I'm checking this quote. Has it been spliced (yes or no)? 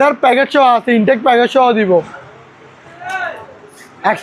yes